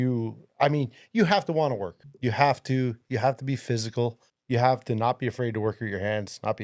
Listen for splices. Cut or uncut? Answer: cut